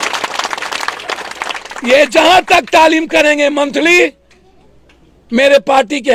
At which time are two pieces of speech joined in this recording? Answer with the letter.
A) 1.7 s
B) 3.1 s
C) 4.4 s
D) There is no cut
D